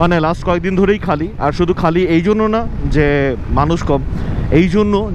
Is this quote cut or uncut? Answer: uncut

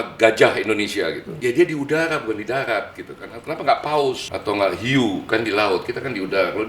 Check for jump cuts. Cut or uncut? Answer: cut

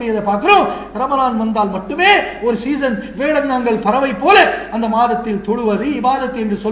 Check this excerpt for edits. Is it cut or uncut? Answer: uncut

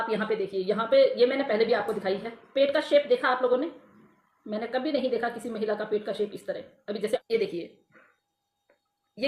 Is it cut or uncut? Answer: cut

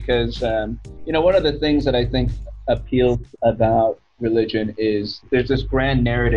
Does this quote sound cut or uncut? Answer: cut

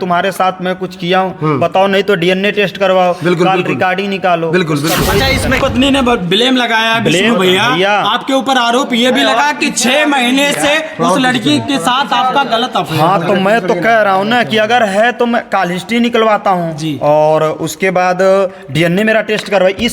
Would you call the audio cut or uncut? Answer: cut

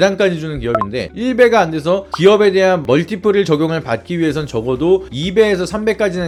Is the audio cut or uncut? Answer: uncut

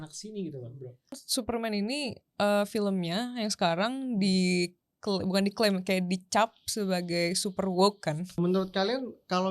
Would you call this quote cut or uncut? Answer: cut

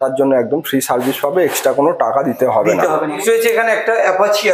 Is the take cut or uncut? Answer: cut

